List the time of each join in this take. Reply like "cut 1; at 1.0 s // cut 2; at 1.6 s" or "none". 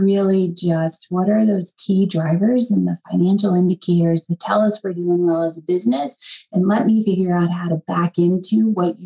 none